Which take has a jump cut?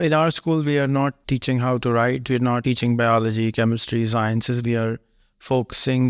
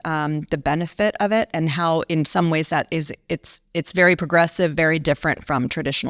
first; 2 cuts; at 1.2 s, 2.6 s

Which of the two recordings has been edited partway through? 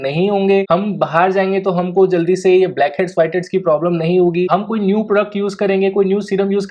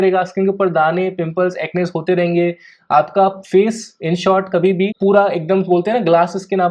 second; 1 cut; at 4.9 s

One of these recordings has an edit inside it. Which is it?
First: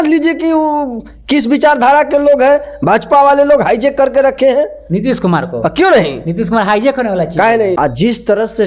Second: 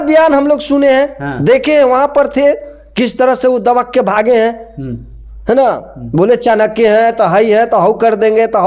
first; 1 cut; at 7.8 s

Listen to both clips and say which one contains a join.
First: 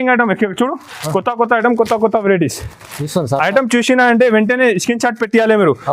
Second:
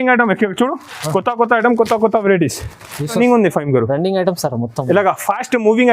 second; 1 cut; at 3.2 s

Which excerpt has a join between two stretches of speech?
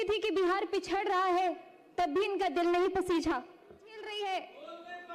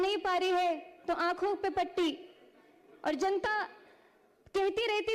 first; 1 cut; at 4.0 s

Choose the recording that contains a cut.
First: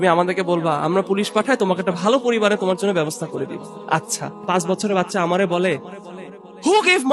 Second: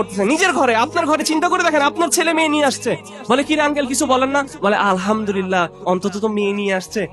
first; 1 cut; at 4.5 s

